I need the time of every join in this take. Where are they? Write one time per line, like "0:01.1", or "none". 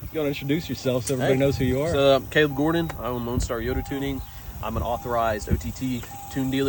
none